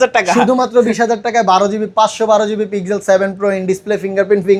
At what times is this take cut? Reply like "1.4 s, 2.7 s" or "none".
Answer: none